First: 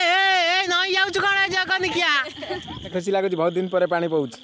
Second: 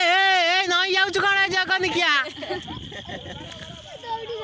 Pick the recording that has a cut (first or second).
first